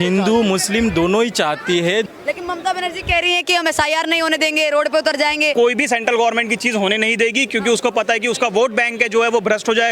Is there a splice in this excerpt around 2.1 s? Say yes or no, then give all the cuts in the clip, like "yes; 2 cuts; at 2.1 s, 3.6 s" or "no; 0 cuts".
yes; 2 cuts; at 2.1 s, 5.5 s